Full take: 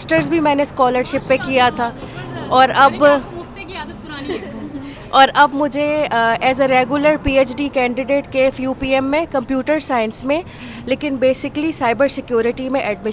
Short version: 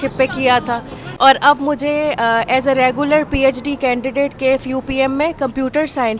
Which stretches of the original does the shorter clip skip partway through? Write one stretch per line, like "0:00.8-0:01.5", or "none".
0:02.1-0:04.9